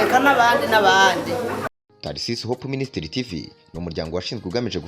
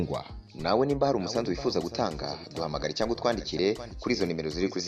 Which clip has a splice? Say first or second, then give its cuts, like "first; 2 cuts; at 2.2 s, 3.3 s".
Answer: first; 1 cut; at 1.7 s